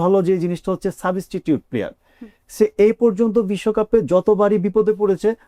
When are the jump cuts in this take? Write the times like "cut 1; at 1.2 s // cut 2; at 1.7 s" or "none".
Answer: none